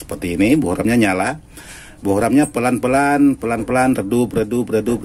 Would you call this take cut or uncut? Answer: uncut